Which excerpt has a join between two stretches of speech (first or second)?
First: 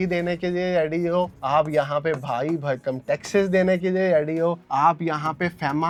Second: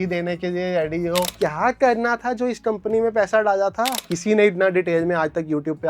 second